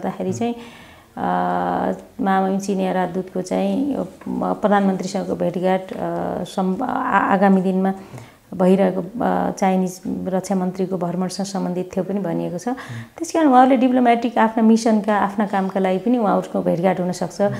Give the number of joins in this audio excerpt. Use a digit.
0